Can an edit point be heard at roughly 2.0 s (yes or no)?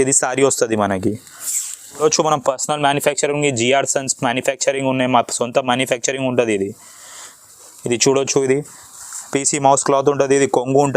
yes